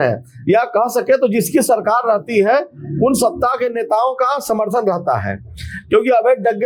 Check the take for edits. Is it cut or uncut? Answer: uncut